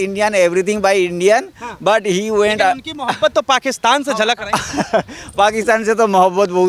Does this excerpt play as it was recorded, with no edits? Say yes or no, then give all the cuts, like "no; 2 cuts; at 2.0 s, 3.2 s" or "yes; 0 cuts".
yes; 0 cuts